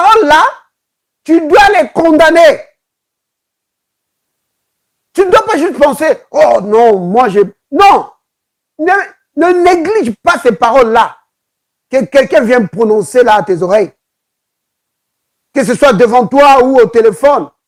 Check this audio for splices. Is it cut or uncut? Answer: uncut